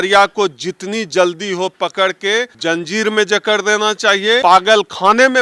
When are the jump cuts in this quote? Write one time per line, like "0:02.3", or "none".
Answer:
0:02.5
0:04.4